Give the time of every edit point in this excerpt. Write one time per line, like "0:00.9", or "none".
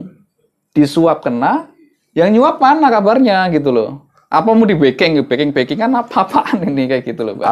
none